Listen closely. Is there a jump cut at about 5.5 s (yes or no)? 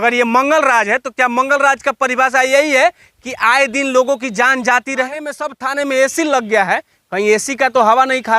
yes